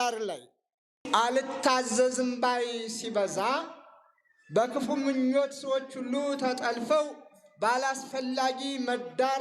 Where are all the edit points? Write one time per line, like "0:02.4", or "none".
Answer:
0:01.0

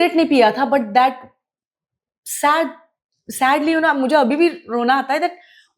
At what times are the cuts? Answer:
none

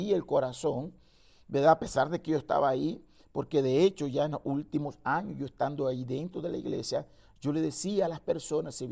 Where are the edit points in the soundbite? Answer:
none

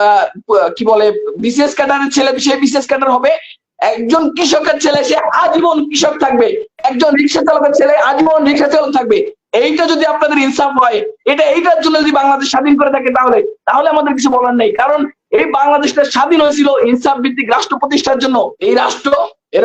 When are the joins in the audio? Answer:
0:18.5

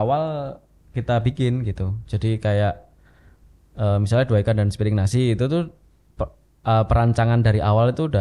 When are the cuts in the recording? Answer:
none

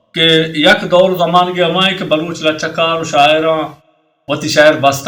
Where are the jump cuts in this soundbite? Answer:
none

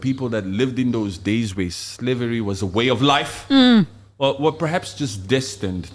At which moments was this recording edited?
none

